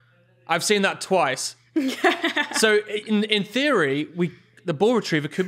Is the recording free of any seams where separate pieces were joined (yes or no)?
yes